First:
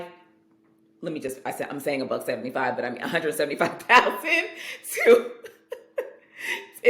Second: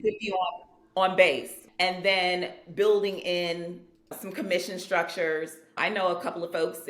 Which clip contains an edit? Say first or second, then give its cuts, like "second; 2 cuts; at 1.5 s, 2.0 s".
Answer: second; 3 cuts; at 1.6 s, 4.2 s, 5.8 s